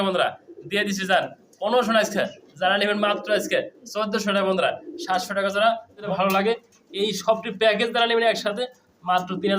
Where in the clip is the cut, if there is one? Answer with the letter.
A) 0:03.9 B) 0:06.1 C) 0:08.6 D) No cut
B